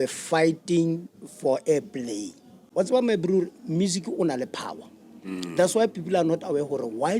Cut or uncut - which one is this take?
cut